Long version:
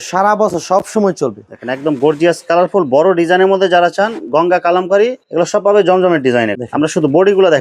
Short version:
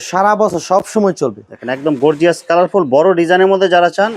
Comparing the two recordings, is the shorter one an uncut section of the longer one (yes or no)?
yes